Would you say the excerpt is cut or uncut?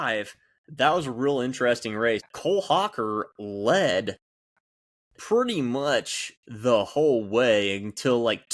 cut